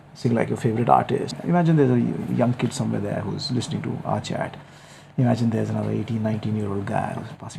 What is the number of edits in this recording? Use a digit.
1